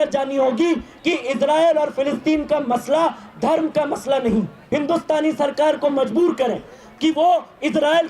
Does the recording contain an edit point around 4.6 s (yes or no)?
yes